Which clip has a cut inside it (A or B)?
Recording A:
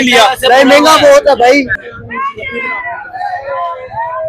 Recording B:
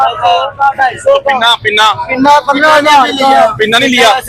A